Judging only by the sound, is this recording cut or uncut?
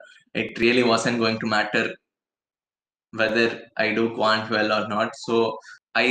uncut